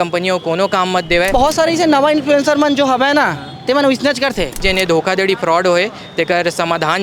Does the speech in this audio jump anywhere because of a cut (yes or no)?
yes